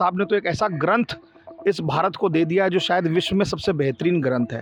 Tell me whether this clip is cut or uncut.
uncut